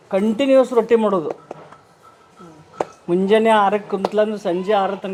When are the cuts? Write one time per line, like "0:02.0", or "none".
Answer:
none